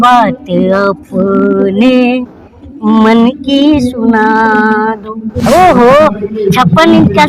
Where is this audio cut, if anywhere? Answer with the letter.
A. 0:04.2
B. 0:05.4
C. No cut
B